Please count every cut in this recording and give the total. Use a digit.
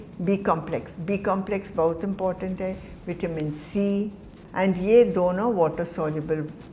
1